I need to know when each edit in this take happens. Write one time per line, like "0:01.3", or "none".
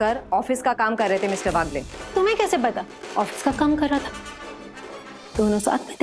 0:02.9